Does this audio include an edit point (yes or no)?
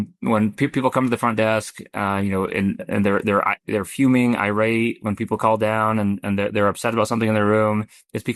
no